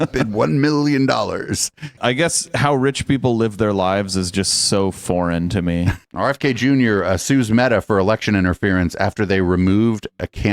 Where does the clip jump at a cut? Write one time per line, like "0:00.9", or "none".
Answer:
0:02.0
0:06.0